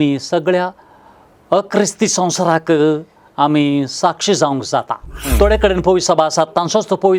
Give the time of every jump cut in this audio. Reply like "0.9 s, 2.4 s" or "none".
5.2 s